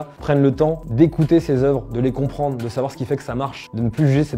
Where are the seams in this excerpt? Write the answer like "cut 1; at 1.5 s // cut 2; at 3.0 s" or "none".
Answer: none